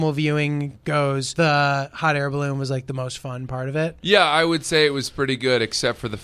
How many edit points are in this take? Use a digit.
1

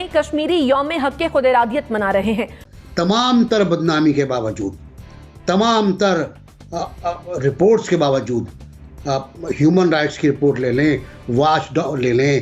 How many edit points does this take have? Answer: 1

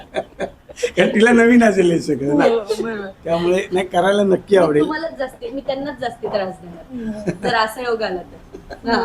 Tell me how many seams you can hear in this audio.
0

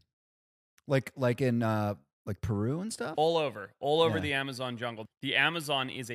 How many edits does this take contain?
1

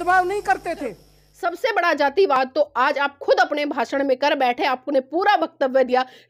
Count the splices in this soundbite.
1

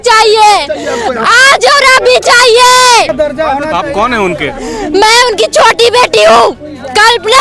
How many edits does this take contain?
1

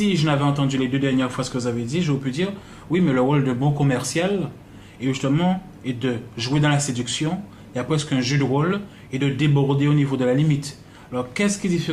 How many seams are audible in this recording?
1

